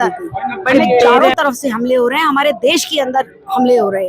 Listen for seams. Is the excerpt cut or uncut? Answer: cut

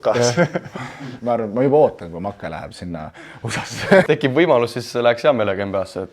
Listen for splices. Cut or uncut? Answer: cut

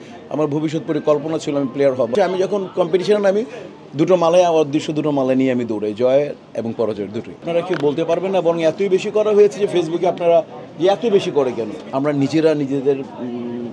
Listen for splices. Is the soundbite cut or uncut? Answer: cut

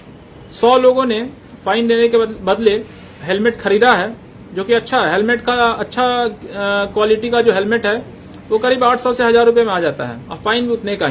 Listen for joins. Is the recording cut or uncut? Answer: uncut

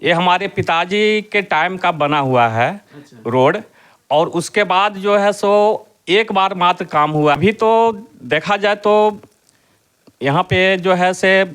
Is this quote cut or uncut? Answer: cut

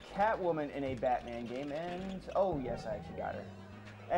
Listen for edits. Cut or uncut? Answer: uncut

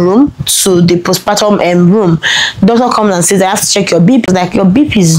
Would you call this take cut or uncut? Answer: cut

